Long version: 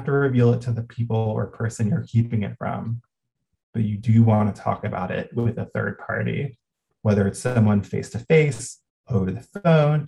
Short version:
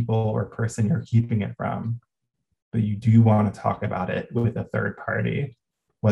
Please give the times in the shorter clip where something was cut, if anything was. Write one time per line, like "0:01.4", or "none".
none